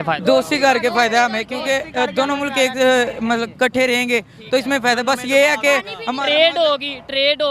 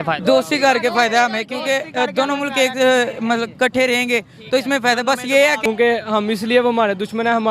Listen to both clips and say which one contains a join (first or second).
second